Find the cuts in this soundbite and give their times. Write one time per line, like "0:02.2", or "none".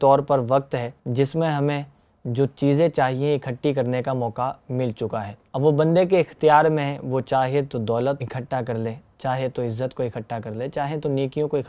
0:01.0
0:05.4
0:08.2